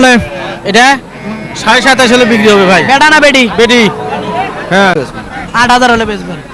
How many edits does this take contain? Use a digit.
1